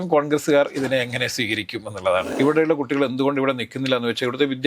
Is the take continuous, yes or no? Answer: no